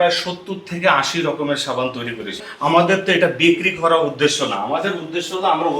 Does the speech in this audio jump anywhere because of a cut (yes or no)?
yes